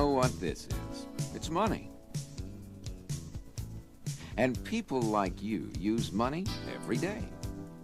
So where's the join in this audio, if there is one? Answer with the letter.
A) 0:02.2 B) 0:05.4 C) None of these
B